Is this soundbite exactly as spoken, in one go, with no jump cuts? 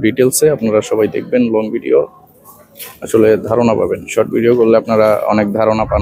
yes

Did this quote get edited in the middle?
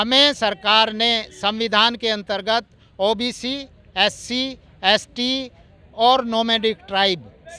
no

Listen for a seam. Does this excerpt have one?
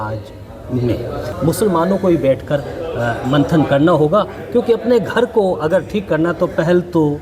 yes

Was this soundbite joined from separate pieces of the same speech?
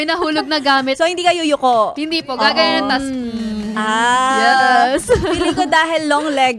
no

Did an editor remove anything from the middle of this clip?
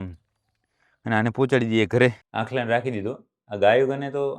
yes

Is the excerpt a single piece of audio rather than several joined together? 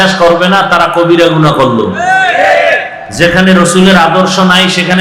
yes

